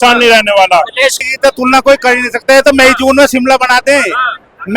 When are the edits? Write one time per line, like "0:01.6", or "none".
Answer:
0:01.2